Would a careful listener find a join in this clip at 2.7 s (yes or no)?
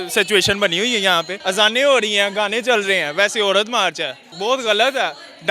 no